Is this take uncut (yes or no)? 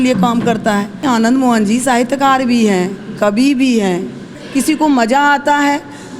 no